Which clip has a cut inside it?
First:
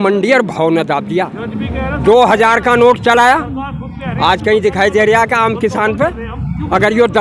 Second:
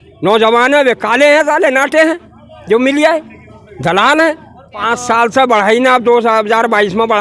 second; 1 cut; at 4.8 s

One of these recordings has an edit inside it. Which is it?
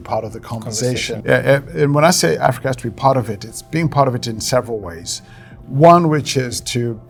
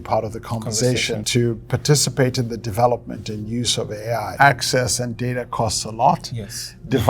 second; 2 cuts; at 1.1 s, 4.3 s

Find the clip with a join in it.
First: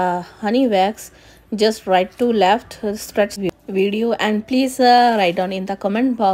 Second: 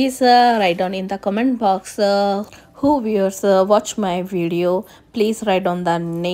first; 1 cut; at 3.3 s

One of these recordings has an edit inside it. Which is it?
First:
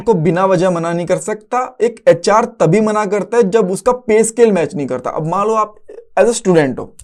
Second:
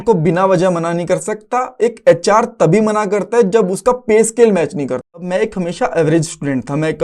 second; 1 cut; at 5.2 s

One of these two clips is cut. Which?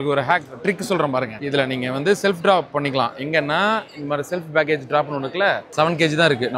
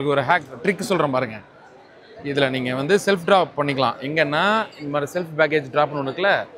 first; 2 cuts; at 1.4 s, 5.7 s

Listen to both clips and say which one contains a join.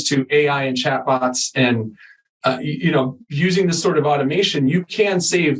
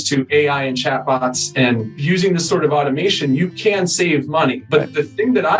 second; 2 cuts; at 1.9 s, 4.6 s

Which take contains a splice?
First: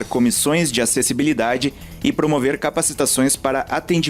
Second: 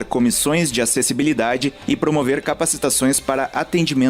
second; 1 cut; at 1.8 s

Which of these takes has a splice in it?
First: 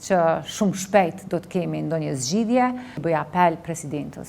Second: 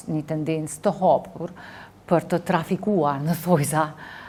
first; 1 cut; at 3.0 s

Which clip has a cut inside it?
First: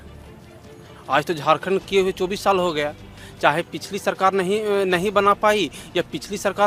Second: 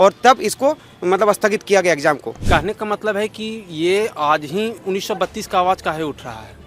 second; 1 cut; at 2.3 s

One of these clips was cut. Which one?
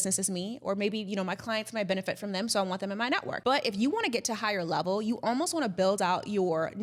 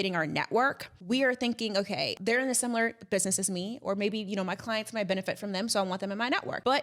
second; 1 cut; at 2.1 s

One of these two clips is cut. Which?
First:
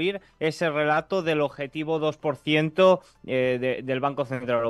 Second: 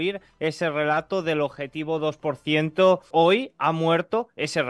second; 1 cut; at 3.1 s

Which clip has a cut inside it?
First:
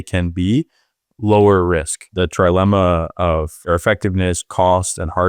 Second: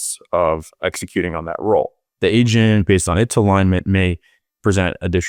first; 1 cut; at 2.1 s

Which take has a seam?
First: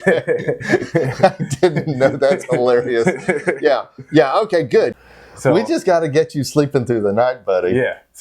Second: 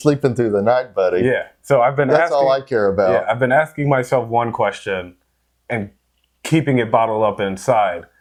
first; 1 cut; at 5.1 s

